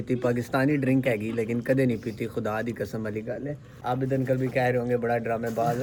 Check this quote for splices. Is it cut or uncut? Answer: uncut